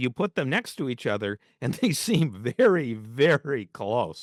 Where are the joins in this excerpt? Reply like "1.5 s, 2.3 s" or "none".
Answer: none

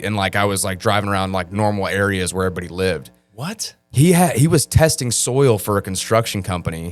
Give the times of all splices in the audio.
none

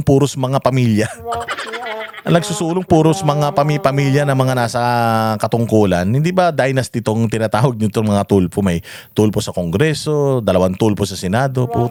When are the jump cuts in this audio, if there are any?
none

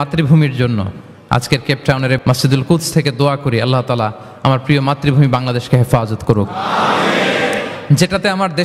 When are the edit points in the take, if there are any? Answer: 2.2 s

